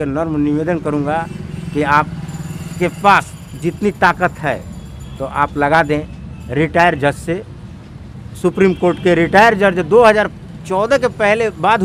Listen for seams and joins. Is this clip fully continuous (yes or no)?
yes